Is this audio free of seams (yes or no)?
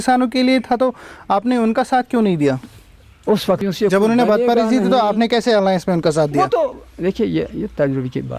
no